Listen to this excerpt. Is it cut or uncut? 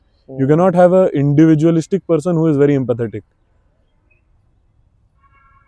uncut